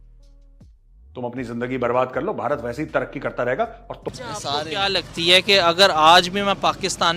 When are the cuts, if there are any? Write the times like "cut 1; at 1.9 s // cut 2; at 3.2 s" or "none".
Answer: cut 1; at 4.1 s